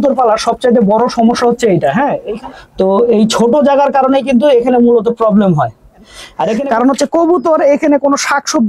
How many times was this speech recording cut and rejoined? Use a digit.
2